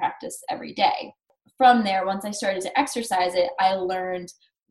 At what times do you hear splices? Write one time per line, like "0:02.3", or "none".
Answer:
0:01.2